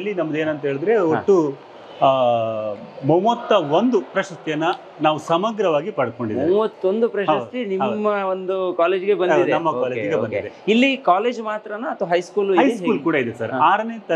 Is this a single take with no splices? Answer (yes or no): yes